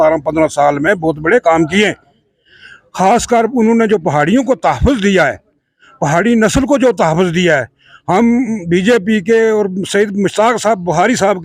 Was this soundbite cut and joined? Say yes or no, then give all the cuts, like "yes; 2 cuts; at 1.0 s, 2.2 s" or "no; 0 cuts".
no; 0 cuts